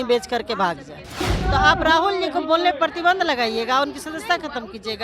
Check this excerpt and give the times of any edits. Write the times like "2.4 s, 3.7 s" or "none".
1.2 s